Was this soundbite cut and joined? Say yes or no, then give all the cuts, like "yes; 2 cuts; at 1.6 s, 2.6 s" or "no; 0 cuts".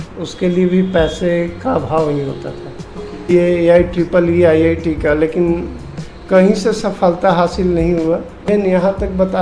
yes; 2 cuts; at 3.3 s, 8.5 s